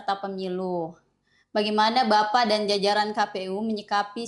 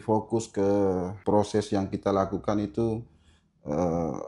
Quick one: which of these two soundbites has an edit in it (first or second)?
second